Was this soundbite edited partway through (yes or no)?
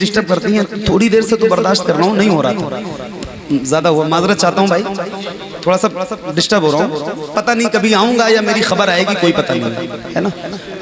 no